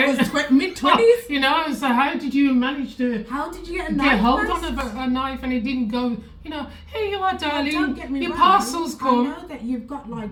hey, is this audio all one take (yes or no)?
yes